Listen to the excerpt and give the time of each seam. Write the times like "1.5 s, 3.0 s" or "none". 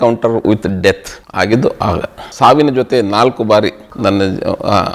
1.2 s, 2.3 s